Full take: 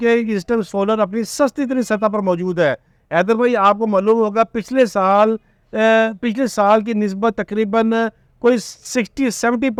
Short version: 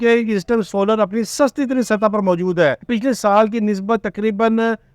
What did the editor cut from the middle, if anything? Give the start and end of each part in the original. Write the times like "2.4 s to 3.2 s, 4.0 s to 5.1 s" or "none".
2.9 s to 6.2 s